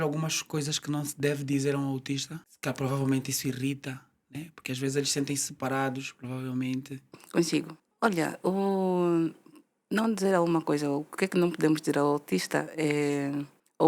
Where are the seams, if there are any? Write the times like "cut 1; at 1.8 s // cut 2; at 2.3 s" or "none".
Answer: none

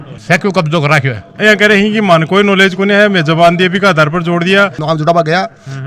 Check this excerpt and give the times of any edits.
cut 1; at 1.3 s // cut 2; at 4.8 s

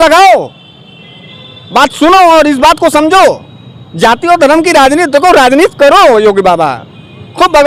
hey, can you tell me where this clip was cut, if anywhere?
none

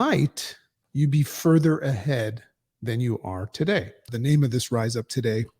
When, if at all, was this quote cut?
cut 1; at 4.1 s

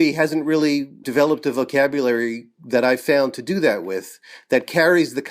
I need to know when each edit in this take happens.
cut 1; at 1.0 s

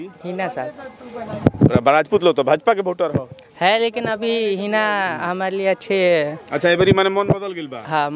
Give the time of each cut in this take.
none

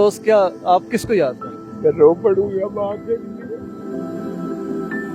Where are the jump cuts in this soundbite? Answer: cut 1; at 3.7 s

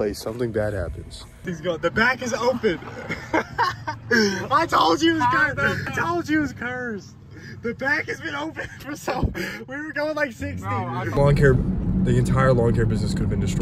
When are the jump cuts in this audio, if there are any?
cut 1; at 1.4 s // cut 2; at 5.9 s // cut 3; at 11.2 s

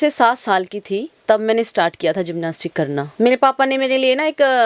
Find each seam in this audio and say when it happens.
cut 1; at 3.1 s

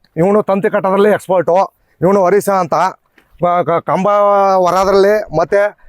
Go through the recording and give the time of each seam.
none

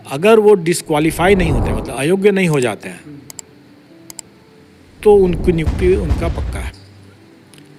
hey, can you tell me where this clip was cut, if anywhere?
none

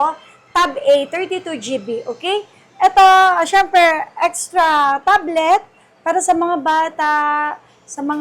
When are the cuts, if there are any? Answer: none

